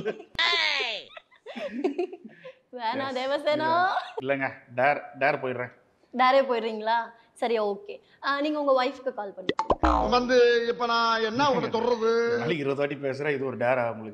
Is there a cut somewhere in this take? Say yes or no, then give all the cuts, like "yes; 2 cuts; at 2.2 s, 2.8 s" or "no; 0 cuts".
no; 0 cuts